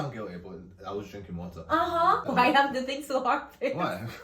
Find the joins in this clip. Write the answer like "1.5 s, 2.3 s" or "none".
2.3 s